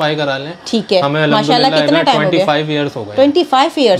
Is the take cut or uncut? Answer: uncut